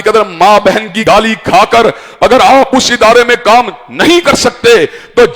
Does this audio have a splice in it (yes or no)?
yes